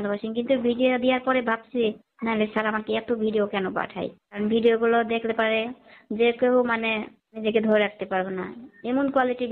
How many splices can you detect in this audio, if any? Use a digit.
3